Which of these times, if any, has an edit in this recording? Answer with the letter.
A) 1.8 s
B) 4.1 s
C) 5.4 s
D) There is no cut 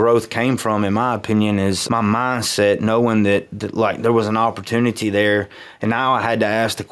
A